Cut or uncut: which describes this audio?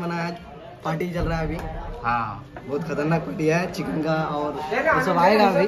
uncut